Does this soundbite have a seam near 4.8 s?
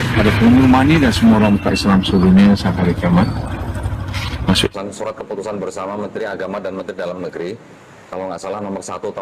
yes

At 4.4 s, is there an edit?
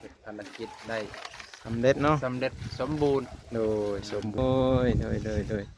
yes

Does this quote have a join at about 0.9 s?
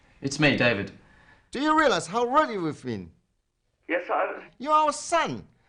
no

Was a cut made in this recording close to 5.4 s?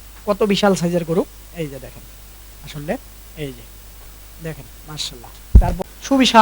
yes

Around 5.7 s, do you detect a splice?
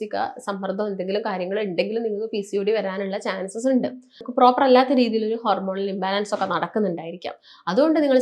no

